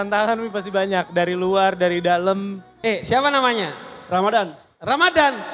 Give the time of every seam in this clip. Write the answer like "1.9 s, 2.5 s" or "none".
2.7 s